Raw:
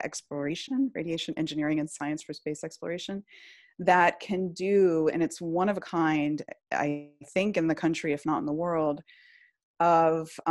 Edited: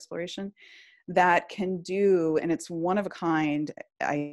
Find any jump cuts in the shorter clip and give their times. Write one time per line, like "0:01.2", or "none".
none